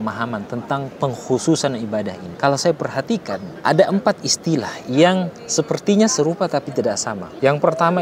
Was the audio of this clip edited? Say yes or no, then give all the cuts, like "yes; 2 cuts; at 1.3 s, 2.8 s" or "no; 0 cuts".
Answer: no; 0 cuts